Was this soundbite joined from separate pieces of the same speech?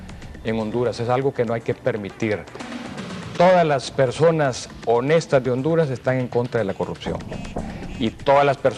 no; 0 cuts

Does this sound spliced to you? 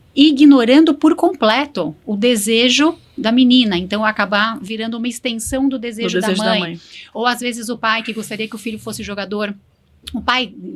no; 0 cuts

